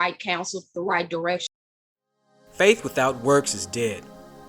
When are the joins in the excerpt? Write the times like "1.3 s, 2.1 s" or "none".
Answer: 1.4 s